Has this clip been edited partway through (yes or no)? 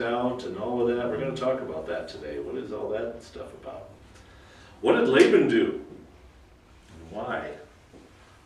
yes